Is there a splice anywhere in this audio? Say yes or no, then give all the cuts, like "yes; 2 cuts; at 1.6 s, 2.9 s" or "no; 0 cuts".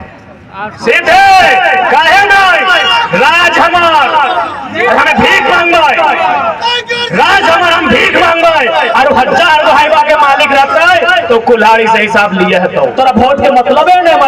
yes; 1 cut; at 13.0 s